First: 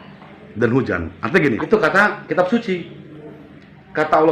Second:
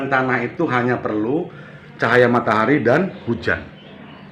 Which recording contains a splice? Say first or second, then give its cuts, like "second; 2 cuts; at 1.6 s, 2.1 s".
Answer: first; 1 cut; at 1.6 s